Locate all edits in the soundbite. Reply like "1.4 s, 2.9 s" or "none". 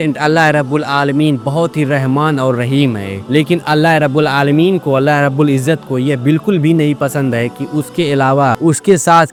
none